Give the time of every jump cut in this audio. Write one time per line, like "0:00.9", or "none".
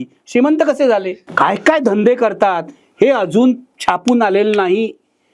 0:01.2